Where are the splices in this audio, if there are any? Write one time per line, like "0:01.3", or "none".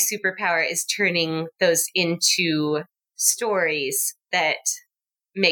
none